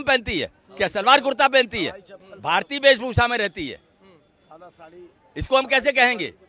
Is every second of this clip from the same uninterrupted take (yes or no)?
yes